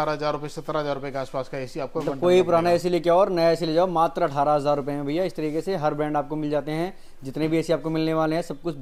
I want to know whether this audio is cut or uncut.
uncut